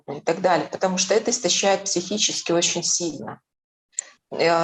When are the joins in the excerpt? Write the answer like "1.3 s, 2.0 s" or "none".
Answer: none